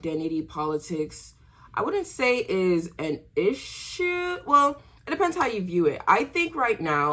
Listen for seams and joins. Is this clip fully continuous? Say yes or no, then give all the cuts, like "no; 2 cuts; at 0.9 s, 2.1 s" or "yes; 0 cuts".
yes; 0 cuts